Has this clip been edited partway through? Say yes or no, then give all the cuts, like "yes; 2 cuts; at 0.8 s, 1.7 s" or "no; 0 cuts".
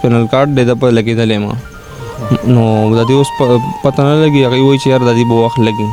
no; 0 cuts